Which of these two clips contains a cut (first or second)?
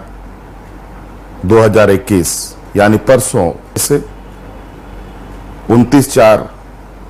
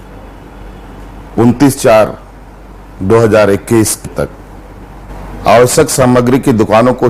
second